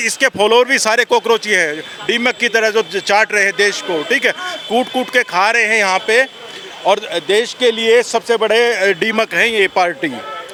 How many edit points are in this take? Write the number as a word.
zero